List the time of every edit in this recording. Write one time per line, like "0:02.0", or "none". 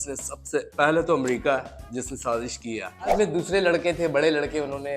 0:03.1

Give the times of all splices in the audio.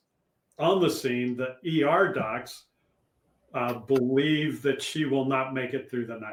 none

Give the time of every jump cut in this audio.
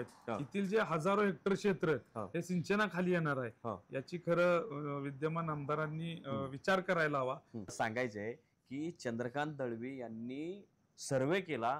0:07.7

